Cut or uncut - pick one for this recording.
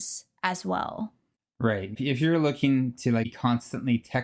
cut